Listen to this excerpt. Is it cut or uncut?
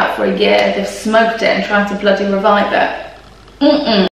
uncut